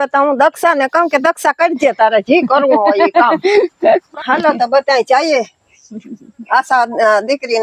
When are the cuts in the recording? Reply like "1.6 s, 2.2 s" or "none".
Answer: 4.1 s